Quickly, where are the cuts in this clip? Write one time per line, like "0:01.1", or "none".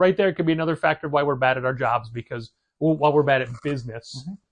none